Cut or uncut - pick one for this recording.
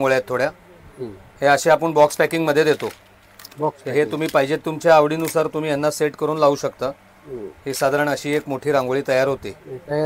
uncut